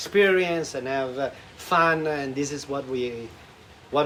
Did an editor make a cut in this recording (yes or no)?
no